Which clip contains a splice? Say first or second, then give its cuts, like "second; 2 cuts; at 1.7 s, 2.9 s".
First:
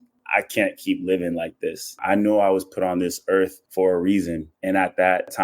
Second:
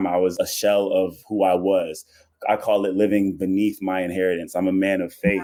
first; 3 cuts; at 2.0 s, 3.6 s, 4.5 s